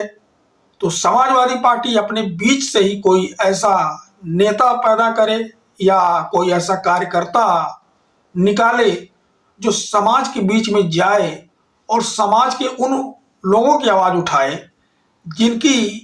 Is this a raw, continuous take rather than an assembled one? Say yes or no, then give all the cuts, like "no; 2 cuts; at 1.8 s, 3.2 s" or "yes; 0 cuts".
yes; 0 cuts